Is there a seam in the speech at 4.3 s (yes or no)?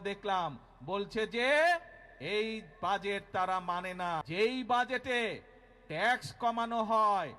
yes